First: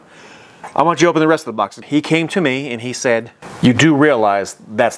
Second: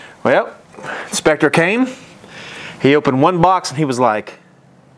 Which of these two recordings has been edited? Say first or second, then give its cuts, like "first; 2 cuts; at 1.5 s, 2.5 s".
first; 1 cut; at 1.8 s